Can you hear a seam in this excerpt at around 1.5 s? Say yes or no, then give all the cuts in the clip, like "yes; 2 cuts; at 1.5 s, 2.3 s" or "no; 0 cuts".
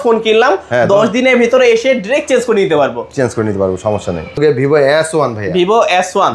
no; 1 cut; at 4.4 s